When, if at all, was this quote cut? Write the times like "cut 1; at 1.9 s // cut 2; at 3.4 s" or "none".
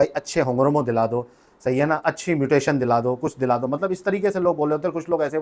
none